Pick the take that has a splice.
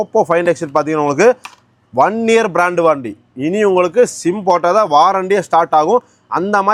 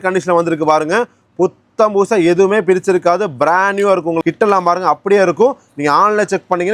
second; 1 cut; at 4.2 s

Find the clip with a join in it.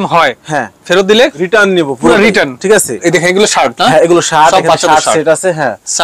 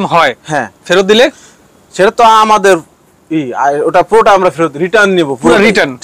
first; 2 cuts; at 1.4 s, 3.0 s

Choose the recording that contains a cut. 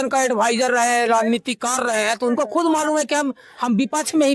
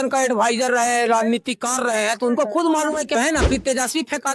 second; 1 cut; at 3.2 s

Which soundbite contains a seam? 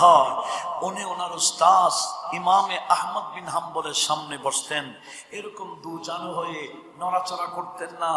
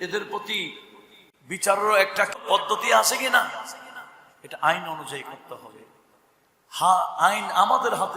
second; 1 cut; at 2.4 s

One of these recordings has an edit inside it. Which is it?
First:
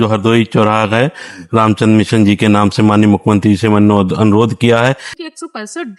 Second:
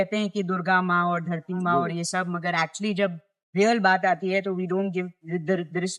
first; 1 cut; at 5.1 s

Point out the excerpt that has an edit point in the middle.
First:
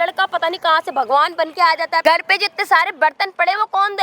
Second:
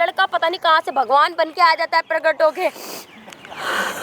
first; 1 cut; at 2.0 s

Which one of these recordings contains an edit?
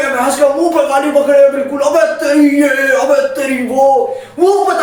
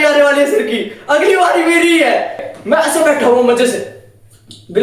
second; 1 cut; at 2.4 s

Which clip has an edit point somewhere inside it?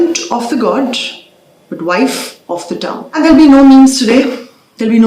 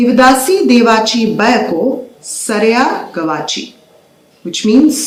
first; 1 cut; at 3.0 s

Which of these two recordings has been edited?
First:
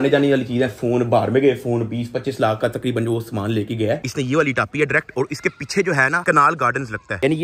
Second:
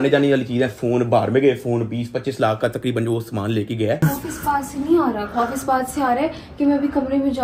first; 1 cut; at 4.0 s

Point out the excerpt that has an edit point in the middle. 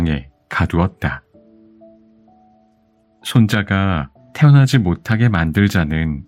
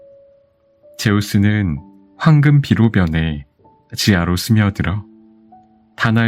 second; 1 cut; at 1.0 s

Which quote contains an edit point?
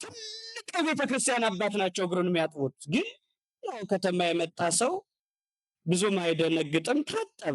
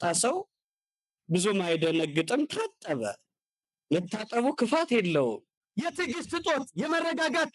second; 1 cut; at 5.5 s

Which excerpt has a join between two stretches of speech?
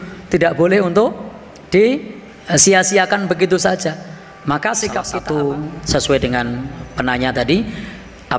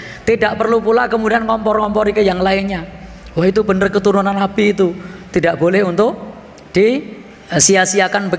first; 1 cut; at 5.1 s

